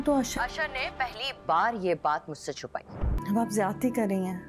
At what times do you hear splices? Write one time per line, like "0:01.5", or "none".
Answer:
0:03.2